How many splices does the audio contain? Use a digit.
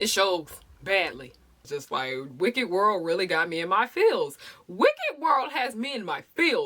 1